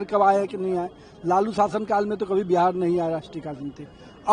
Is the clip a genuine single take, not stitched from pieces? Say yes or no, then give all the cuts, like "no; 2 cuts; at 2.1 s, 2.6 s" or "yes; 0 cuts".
yes; 0 cuts